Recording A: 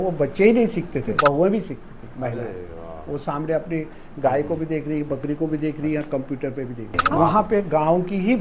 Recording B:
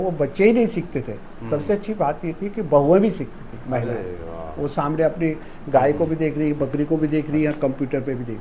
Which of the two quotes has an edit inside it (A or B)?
A